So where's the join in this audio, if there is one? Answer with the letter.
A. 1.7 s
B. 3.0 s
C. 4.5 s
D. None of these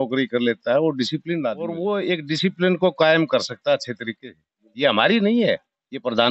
A